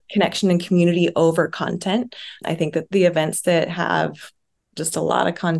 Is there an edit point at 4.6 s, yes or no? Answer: no